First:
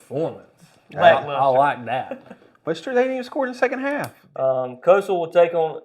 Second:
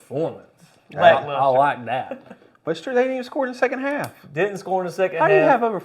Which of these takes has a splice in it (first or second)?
first